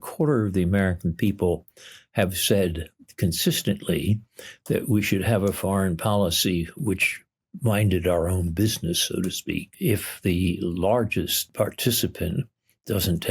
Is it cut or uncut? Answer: cut